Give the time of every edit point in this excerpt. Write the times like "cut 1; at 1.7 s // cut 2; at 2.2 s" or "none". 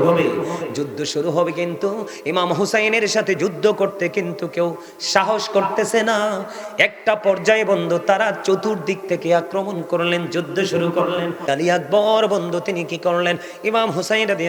cut 1; at 11.5 s